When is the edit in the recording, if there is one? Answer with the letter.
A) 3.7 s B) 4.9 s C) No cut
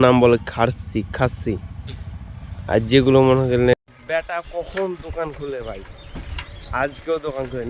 A